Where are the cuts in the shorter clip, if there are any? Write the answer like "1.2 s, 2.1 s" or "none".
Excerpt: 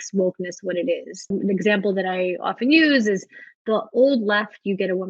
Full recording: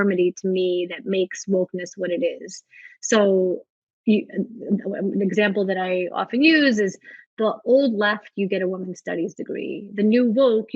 1.3 s